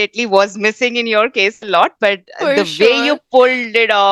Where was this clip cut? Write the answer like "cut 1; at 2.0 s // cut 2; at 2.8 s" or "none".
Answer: none